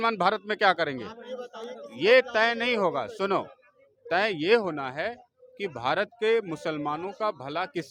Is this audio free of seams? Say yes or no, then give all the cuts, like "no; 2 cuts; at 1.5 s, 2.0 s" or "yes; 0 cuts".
yes; 0 cuts